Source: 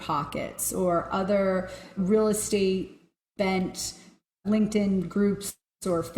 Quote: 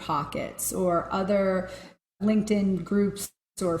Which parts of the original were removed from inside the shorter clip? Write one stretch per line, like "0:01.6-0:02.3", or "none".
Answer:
0:01.8-0:04.0